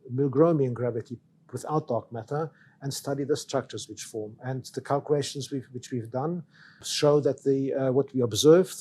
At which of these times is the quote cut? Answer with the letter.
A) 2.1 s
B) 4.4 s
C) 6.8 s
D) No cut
C